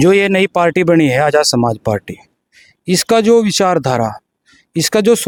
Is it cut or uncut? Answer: uncut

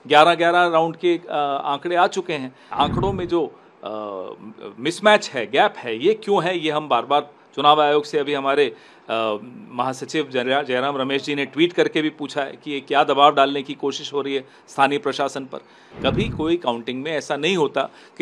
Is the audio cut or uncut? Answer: cut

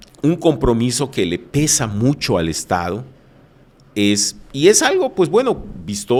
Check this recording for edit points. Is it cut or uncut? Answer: uncut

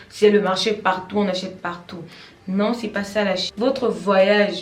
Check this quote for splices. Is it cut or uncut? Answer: cut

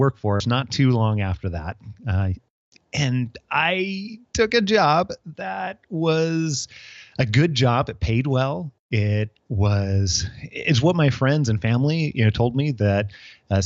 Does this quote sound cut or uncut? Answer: uncut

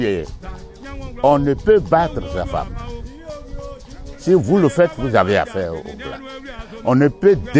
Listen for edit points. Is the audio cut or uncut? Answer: uncut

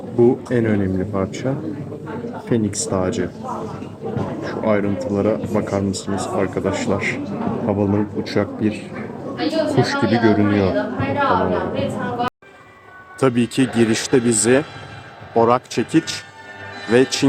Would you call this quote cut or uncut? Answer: cut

